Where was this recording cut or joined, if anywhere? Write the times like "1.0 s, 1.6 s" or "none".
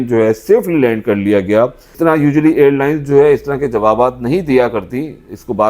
1.9 s